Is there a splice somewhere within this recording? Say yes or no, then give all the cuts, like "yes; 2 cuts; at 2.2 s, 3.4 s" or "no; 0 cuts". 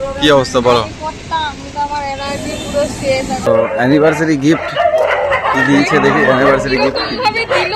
yes; 1 cut; at 3.5 s